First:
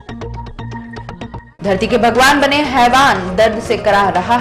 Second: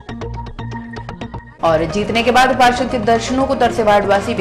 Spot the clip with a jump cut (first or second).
first